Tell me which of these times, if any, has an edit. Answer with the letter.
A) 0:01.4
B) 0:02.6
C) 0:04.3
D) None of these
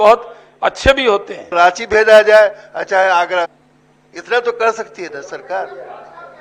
A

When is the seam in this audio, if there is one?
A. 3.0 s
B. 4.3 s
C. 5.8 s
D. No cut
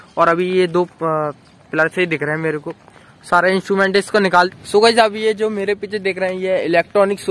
B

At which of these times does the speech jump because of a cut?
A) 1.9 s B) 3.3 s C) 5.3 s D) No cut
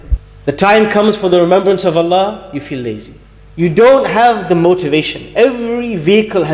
D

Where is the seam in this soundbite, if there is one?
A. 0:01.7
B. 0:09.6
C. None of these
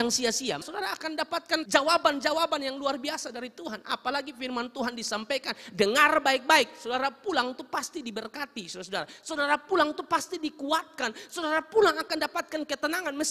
A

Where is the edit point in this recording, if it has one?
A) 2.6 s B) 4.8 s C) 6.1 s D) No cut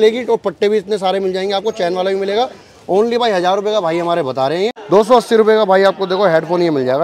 B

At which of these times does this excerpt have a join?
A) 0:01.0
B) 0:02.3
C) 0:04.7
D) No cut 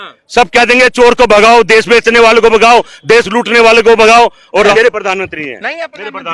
C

